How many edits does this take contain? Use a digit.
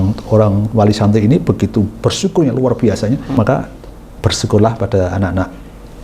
1